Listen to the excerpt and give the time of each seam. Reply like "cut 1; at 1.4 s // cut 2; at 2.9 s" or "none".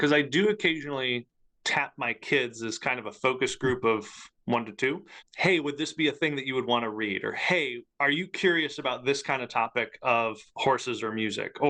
none